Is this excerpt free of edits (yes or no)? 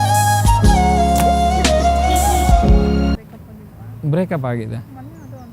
no